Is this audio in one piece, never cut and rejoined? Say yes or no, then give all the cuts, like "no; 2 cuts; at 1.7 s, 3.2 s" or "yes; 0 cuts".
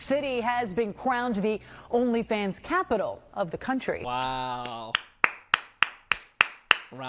no; 1 cut; at 4.1 s